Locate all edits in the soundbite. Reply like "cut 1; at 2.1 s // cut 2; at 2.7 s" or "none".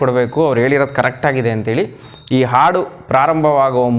none